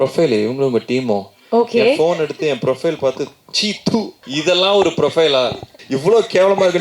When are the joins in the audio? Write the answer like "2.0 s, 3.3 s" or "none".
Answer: 4.2 s, 5.8 s